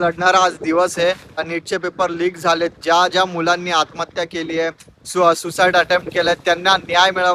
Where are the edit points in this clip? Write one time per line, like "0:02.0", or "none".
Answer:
0:01.5